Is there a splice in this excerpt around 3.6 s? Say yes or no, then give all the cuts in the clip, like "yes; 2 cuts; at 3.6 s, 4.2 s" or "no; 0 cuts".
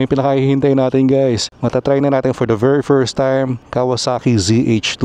yes; 2 cuts; at 1.5 s, 3.6 s